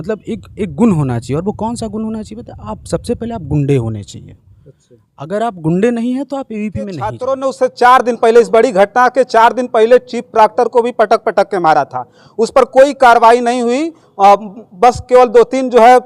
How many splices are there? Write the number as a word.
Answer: one